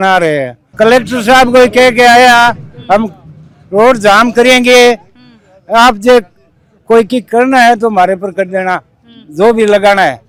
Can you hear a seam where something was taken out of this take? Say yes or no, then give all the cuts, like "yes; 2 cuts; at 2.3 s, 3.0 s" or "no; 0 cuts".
no; 0 cuts